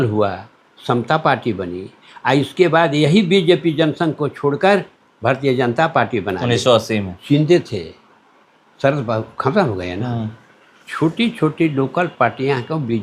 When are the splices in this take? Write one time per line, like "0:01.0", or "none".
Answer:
0:07.1